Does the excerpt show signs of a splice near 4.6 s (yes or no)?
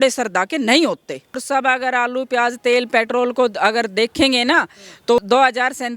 no